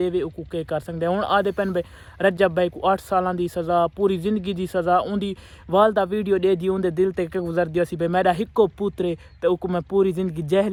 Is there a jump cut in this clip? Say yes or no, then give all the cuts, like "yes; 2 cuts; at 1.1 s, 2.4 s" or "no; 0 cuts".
no; 0 cuts